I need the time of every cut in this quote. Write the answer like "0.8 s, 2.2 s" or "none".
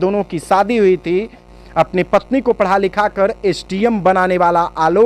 1.4 s